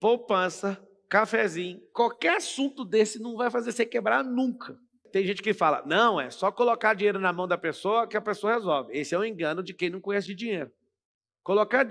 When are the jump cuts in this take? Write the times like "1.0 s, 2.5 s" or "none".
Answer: 5.0 s